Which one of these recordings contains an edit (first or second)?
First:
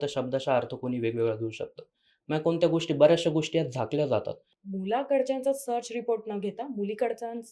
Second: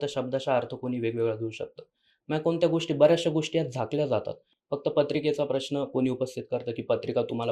first